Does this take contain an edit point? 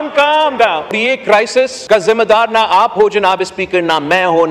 yes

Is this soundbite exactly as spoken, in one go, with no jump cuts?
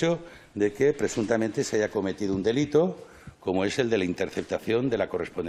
yes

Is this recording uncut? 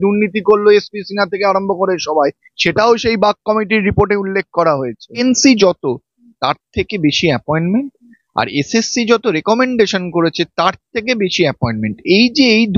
no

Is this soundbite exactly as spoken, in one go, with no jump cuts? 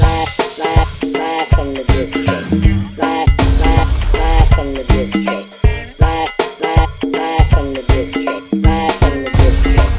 yes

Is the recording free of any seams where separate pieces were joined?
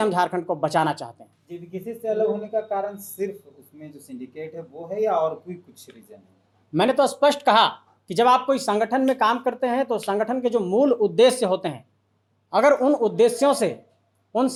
yes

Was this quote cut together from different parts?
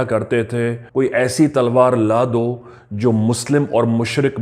no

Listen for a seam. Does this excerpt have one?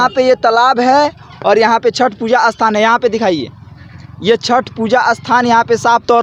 no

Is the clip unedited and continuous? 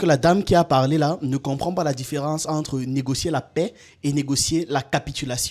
yes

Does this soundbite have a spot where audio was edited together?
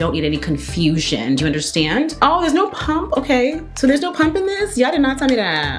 yes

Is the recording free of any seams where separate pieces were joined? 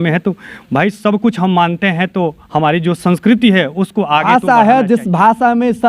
no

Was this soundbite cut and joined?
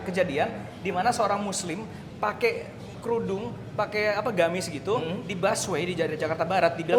no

